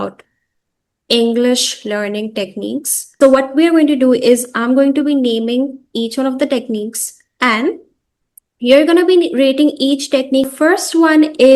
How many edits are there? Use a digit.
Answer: 2